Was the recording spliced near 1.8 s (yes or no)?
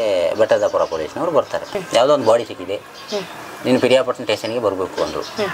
yes